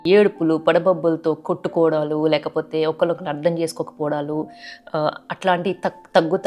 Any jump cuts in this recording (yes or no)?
no